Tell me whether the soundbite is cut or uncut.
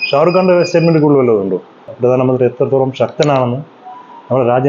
cut